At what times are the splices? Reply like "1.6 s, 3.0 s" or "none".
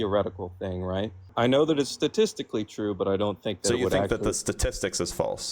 1.3 s